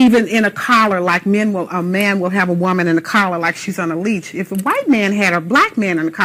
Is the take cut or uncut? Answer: uncut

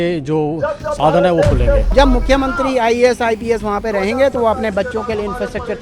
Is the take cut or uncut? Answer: cut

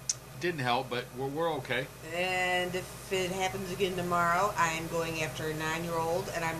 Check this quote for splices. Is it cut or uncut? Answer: uncut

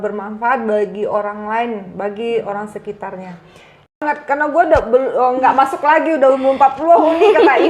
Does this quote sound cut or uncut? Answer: cut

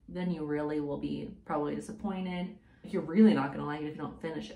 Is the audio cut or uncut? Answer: uncut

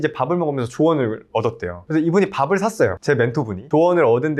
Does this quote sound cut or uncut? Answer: uncut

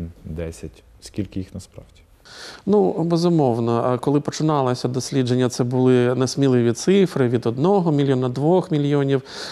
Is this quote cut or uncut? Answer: uncut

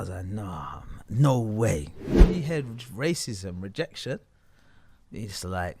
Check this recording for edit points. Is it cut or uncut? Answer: cut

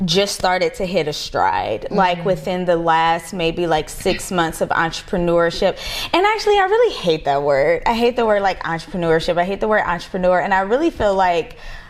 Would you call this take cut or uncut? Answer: uncut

